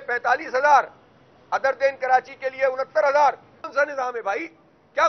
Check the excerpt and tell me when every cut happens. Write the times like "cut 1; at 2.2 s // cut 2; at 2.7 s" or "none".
cut 1; at 3.7 s